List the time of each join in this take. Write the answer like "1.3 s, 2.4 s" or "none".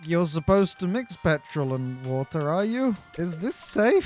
3.1 s